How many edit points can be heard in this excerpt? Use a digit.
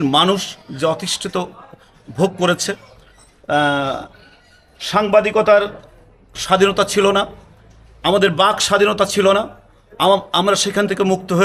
0